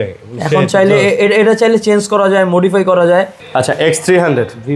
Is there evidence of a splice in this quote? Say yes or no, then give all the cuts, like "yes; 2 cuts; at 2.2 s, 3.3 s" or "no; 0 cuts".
yes; 1 cut; at 3.4 s